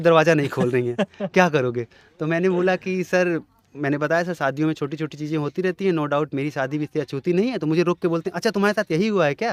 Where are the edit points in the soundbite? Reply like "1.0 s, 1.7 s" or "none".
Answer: none